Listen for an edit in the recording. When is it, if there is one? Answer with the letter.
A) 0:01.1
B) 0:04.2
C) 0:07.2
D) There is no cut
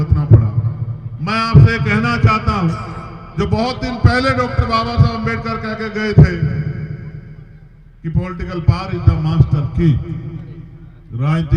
D